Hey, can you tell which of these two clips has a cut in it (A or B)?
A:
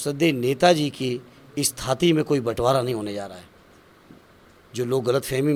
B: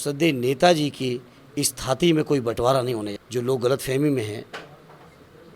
B